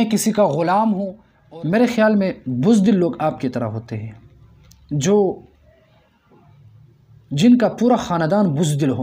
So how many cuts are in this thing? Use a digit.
1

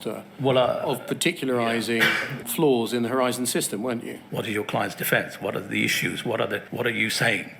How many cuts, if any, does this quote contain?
3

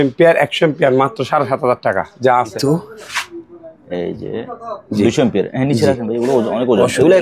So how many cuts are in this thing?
1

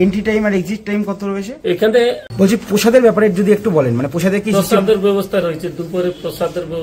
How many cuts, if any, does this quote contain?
1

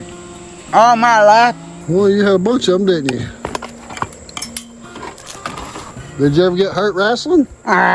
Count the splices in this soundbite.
2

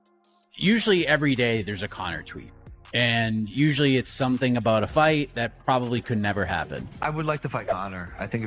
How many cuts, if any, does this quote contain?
1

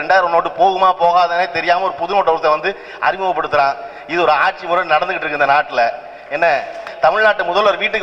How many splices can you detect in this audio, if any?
1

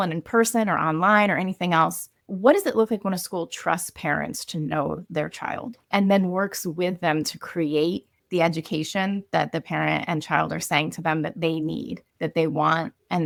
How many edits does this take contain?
0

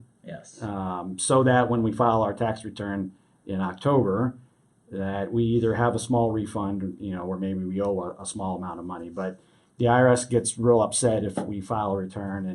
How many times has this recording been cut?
0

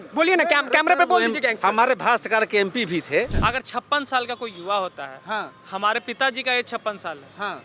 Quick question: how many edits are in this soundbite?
1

